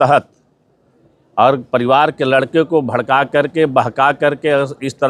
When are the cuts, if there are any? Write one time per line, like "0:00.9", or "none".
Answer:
none